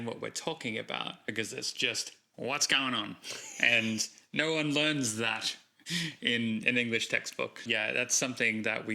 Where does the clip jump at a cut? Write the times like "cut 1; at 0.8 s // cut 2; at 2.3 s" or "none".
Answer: none